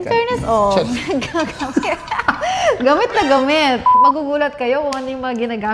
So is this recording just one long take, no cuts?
yes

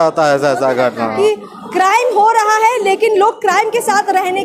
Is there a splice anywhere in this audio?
yes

